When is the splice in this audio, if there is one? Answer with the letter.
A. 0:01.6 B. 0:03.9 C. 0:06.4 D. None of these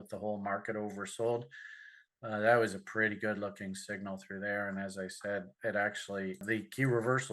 C